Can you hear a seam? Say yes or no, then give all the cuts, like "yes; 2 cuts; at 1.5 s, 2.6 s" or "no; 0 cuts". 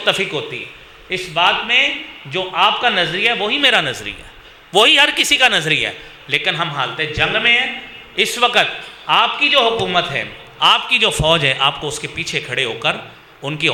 no; 0 cuts